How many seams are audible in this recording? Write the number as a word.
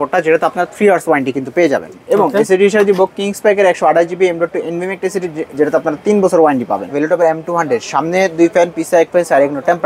two